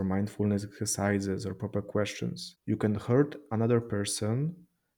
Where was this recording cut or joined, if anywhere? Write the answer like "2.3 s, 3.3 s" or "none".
2.5 s